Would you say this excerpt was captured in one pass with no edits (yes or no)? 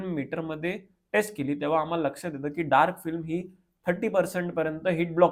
yes